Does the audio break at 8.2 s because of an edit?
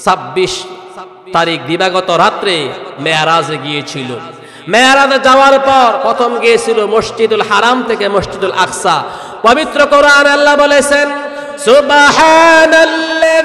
no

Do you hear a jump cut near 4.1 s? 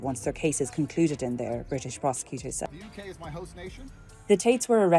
no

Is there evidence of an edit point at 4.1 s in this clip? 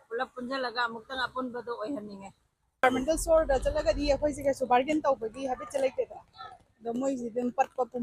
no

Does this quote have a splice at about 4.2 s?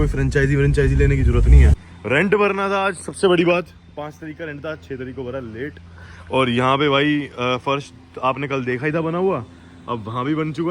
no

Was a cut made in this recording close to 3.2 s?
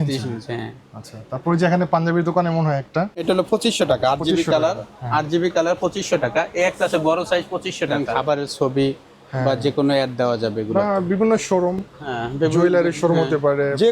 yes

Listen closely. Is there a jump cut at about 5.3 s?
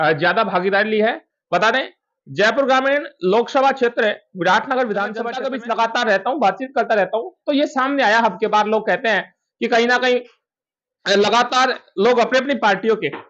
yes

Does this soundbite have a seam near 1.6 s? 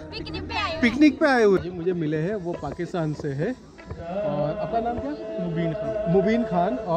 yes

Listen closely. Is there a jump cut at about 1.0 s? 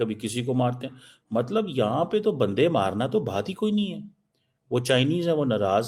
no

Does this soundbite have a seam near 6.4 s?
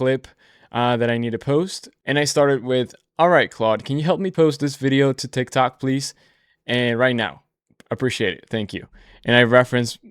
no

